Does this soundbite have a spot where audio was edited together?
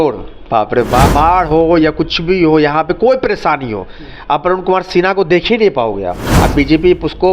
yes; 2 cuts; at 1.1 s, 6.4 s

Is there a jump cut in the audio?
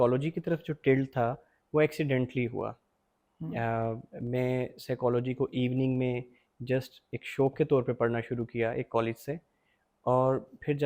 no; 0 cuts

